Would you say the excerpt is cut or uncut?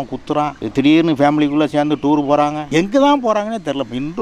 uncut